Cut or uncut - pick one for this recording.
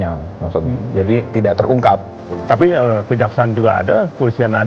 cut